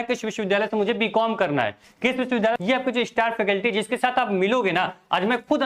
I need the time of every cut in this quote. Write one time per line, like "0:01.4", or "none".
0:02.5

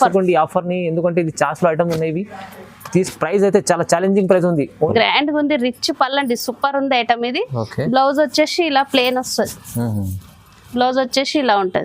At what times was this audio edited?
0:04.9

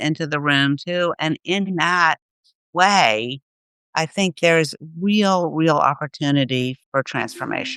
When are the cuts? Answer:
0:06.8

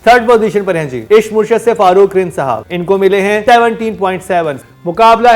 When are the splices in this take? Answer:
0:00.9
0:02.7
0:03.4

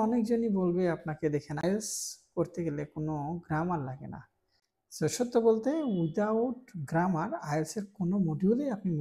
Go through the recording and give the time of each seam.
0:01.6

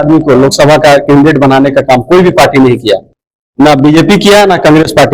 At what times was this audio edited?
none

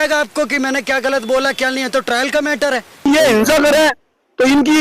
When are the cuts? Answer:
0:03.0

